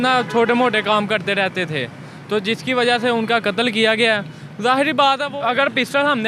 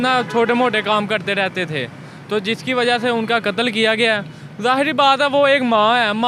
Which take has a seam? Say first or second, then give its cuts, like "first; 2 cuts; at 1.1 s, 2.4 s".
first; 1 cut; at 5.2 s